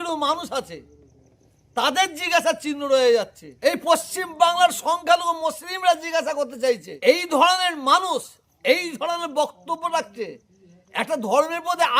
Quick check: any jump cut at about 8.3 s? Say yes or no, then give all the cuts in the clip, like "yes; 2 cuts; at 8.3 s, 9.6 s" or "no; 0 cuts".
no; 2 cuts; at 3.4 s, 6.9 s